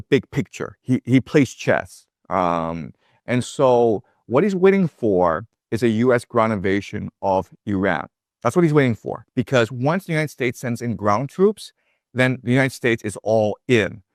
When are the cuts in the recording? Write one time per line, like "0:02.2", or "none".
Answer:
none